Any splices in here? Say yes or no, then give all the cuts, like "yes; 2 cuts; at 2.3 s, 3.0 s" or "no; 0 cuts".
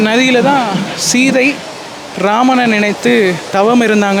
no; 0 cuts